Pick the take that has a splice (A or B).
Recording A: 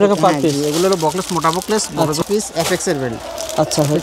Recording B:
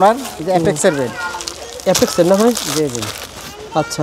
A